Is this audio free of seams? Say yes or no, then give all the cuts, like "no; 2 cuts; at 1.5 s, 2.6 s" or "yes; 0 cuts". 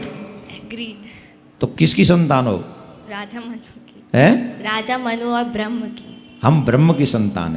yes; 0 cuts